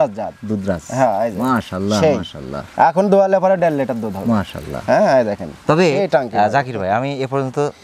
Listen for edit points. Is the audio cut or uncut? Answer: uncut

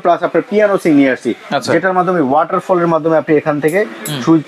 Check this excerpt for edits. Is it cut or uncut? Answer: uncut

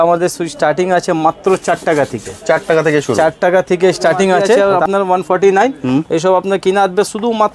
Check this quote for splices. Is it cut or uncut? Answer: cut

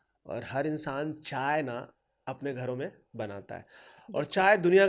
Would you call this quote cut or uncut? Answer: uncut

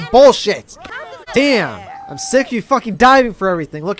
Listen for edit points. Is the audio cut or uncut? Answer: cut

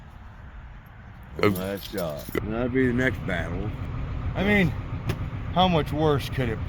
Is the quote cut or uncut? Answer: cut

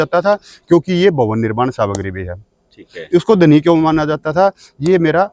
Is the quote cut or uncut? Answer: uncut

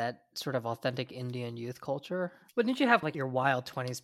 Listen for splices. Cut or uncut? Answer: cut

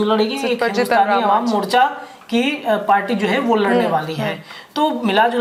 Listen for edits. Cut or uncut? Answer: uncut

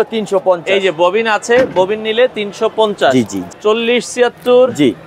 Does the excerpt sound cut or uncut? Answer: cut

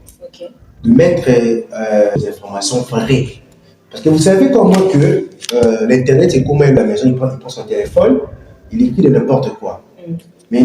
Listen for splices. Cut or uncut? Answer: cut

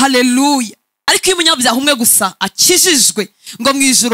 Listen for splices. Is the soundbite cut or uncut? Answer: cut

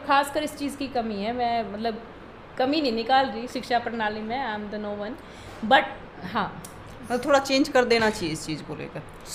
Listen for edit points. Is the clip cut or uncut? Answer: uncut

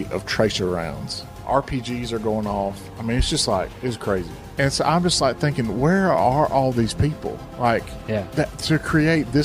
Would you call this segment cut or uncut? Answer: cut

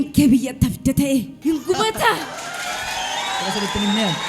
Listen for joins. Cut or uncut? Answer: cut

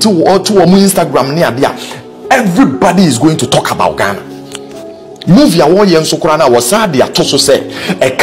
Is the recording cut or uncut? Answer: uncut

